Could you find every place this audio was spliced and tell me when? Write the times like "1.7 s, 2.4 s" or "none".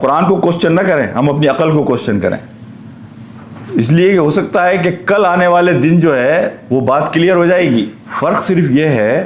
8.0 s